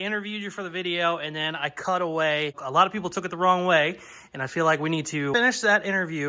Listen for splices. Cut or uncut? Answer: cut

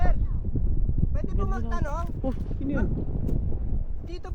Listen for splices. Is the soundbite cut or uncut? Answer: uncut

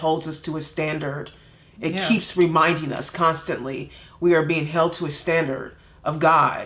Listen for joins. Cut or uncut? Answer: uncut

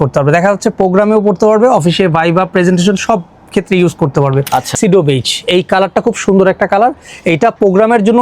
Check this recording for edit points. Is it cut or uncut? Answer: cut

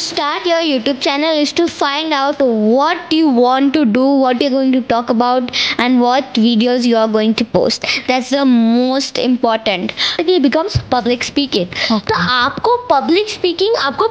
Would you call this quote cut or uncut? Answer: cut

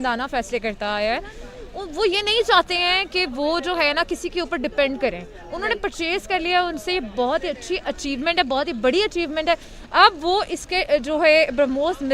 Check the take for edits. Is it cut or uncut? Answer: uncut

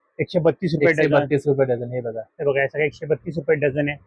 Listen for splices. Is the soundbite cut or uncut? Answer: uncut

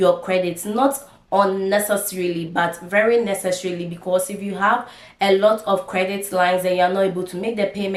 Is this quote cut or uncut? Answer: uncut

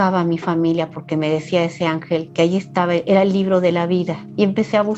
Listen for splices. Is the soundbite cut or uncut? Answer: uncut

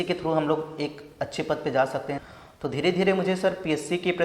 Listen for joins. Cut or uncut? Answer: cut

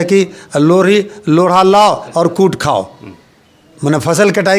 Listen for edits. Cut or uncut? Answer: uncut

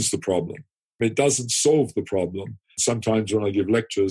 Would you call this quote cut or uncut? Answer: cut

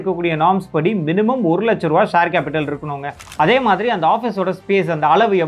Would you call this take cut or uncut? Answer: cut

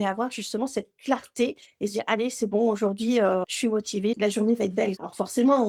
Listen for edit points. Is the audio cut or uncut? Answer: uncut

